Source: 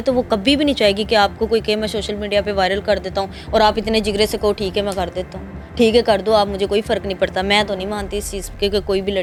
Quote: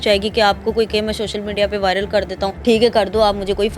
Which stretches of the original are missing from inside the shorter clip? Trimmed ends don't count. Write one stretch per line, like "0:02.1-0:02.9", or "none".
0:03.3-0:05.7